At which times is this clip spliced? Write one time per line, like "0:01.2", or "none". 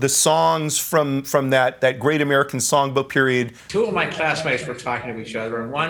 0:03.4